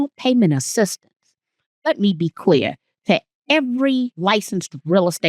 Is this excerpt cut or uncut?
cut